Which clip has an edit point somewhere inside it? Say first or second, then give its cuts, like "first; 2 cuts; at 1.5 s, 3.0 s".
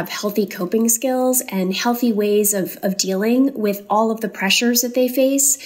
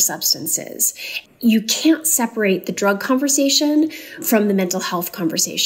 second; 2 cuts; at 1.2 s, 4.2 s